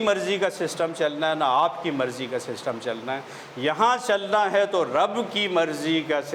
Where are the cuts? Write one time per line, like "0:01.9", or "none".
none